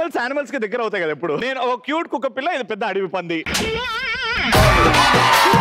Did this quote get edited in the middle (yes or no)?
yes